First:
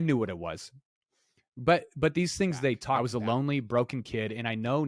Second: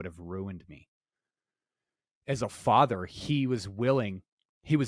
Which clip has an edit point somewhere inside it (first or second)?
first